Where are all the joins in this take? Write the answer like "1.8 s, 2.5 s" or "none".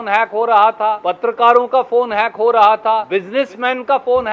1.1 s, 3.1 s